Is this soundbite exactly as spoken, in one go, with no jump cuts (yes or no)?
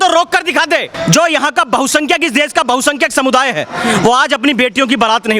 no